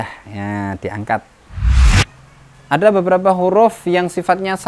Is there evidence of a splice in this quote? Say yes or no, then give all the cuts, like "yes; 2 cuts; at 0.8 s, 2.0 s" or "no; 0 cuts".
yes; 1 cut; at 1.8 s